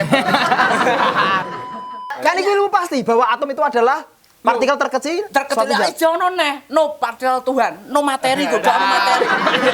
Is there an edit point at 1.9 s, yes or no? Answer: yes